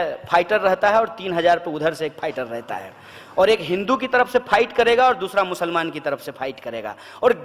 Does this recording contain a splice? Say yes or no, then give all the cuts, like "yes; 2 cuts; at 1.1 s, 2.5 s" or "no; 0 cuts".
no; 0 cuts